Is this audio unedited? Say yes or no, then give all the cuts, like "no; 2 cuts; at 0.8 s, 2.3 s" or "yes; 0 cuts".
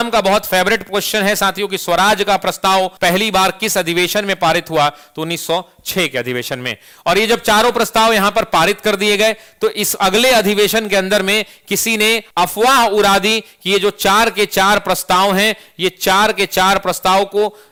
yes; 0 cuts